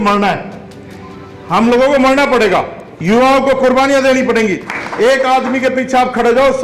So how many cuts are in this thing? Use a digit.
1